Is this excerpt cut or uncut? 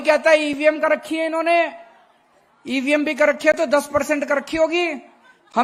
uncut